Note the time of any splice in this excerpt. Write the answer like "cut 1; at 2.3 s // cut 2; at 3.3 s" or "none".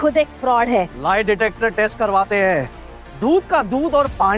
cut 1; at 1.0 s

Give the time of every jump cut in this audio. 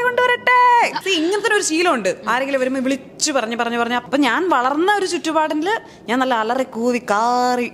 cut 1; at 1.0 s // cut 2; at 4.0 s

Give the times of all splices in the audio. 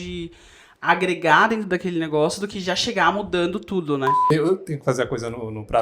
cut 1; at 4.2 s

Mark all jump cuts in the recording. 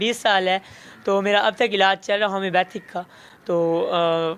none

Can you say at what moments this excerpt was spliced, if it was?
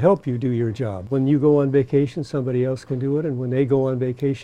cut 1; at 1.0 s

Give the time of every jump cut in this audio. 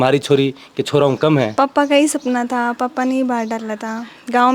cut 1; at 1.5 s

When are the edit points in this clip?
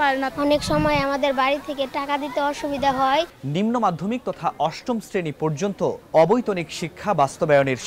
cut 1; at 3.3 s // cut 2; at 6.0 s

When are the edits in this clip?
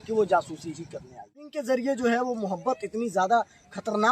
cut 1; at 1.6 s

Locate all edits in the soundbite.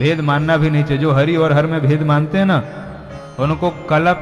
none

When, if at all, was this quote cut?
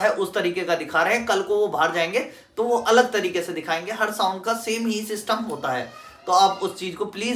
none

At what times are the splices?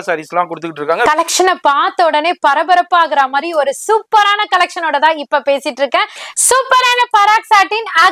cut 1; at 1.1 s // cut 2; at 6.2 s

